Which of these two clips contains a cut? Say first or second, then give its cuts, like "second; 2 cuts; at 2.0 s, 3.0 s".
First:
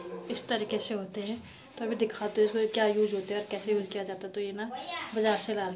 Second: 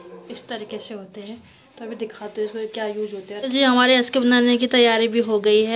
second; 1 cut; at 3.4 s